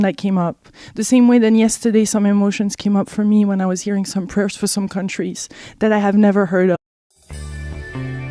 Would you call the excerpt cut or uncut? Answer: uncut